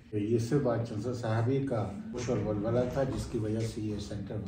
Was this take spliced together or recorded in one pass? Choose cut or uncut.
cut